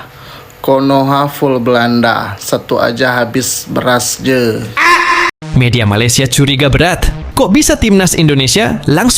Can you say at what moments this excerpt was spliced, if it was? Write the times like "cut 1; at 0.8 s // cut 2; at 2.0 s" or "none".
cut 1; at 5.3 s